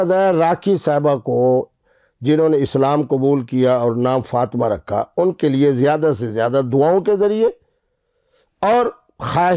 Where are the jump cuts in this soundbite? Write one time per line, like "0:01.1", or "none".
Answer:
none